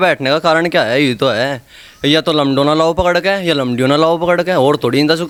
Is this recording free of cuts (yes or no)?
yes